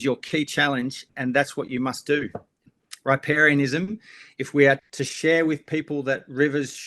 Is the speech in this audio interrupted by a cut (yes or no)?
yes